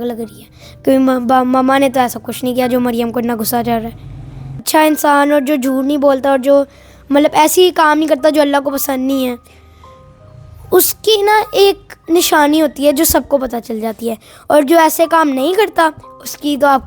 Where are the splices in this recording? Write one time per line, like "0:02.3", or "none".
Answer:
0:04.6